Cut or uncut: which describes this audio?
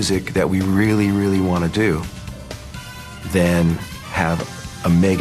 uncut